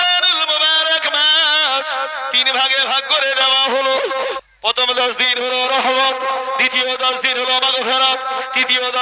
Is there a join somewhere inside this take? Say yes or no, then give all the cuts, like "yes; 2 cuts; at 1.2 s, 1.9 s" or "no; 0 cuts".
yes; 1 cut; at 4.4 s